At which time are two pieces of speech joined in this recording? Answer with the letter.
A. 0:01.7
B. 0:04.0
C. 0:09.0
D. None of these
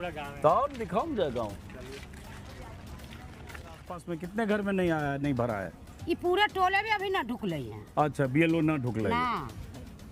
B